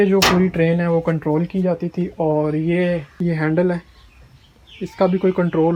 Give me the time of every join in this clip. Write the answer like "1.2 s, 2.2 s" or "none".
none